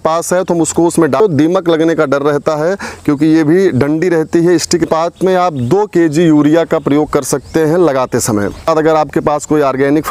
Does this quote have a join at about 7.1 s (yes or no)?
no